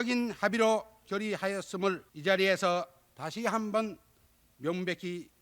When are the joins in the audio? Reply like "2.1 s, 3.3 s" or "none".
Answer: 2.1 s

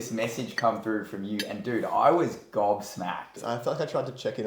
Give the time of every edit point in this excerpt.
3.4 s

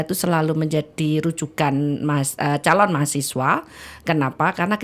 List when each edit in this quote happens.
none

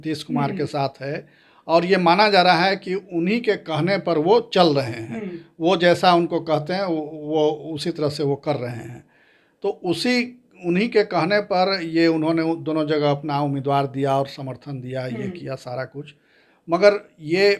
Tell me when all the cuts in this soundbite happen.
none

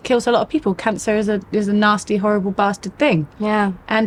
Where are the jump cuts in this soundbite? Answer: none

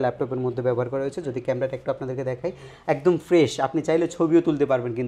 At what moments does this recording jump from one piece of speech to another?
none

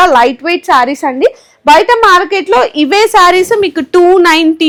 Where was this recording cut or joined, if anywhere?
none

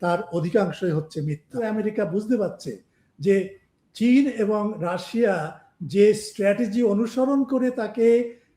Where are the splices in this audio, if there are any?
1.6 s

